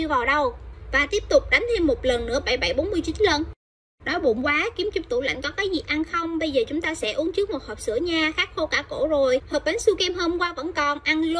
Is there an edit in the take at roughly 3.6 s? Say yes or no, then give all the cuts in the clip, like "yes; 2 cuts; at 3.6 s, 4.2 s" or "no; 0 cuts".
yes; 1 cut; at 3.6 s